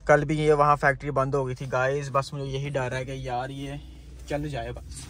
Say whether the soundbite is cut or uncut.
uncut